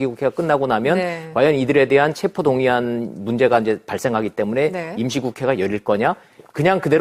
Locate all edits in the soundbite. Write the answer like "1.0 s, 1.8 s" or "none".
2.2 s